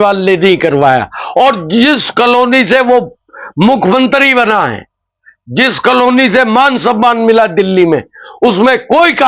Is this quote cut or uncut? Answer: uncut